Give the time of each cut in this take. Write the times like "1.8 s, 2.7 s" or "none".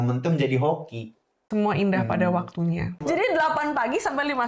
1.5 s, 3.0 s